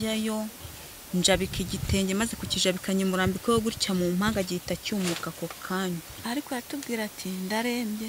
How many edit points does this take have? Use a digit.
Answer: 1